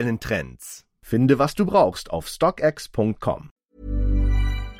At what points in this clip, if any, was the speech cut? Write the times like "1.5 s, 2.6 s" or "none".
3.5 s